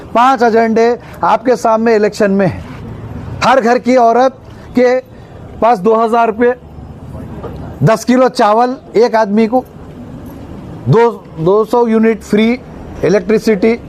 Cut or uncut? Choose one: uncut